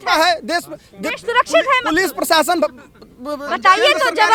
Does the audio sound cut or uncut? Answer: uncut